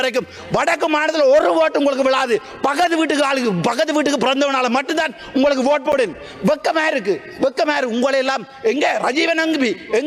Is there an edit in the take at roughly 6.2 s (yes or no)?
no